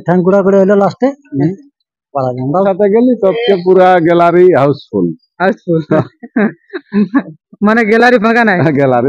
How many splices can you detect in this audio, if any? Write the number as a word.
one